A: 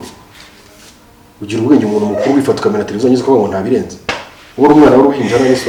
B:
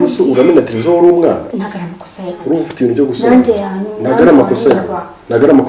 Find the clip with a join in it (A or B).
B